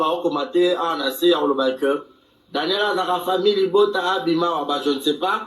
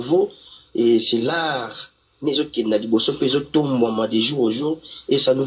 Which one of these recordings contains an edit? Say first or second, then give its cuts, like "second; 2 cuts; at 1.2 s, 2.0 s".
second; 1 cut; at 1.0 s